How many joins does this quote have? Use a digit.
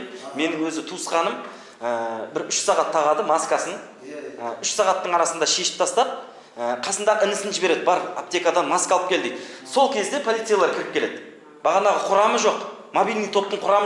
0